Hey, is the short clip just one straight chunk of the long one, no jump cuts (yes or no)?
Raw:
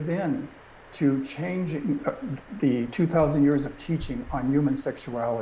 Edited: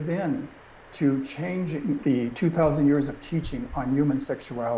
no